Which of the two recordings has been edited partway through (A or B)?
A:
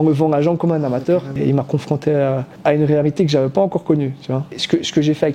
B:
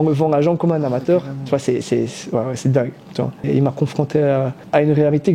A